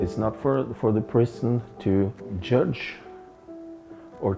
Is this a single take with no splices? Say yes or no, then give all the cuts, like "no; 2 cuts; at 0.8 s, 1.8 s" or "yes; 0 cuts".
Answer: no; 1 cut; at 2.4 s